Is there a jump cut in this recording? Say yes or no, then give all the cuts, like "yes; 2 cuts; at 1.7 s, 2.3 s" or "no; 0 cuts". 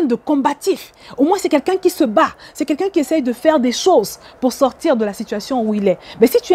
no; 0 cuts